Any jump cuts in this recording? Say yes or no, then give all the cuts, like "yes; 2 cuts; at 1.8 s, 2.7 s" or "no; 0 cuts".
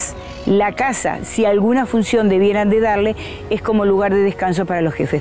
no; 0 cuts